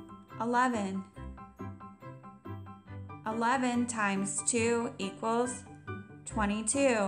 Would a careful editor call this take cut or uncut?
uncut